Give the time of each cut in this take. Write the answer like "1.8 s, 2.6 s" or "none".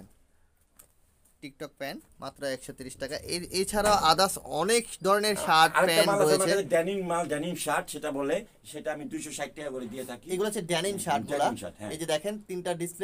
none